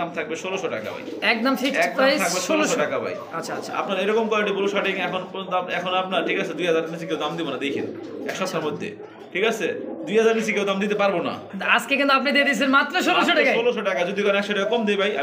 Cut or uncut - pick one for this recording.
uncut